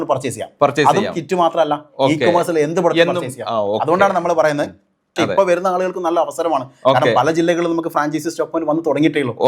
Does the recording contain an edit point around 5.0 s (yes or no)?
yes